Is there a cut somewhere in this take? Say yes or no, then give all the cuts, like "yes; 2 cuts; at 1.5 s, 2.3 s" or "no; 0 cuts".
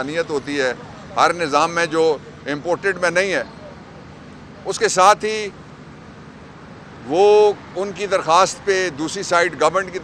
no; 0 cuts